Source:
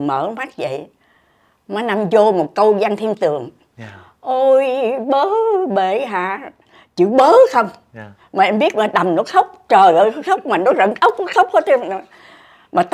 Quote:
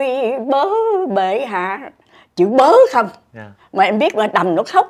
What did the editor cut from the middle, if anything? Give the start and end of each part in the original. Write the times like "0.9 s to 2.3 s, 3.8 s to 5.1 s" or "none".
none